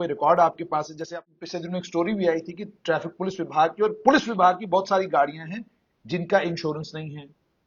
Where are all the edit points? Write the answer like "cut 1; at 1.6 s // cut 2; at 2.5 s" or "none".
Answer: cut 1; at 1.1 s